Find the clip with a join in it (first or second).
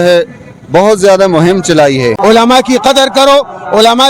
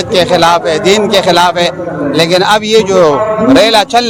first